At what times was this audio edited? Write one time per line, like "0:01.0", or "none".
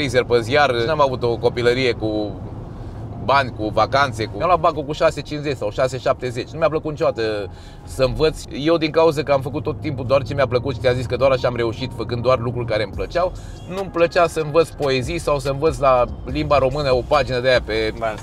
0:00.8
0:04.3
0:08.4